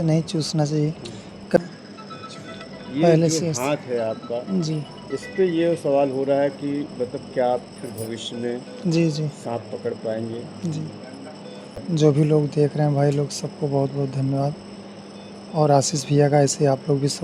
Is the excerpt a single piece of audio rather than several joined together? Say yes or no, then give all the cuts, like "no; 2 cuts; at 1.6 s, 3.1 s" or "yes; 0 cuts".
no; 2 cuts; at 1.6 s, 11.8 s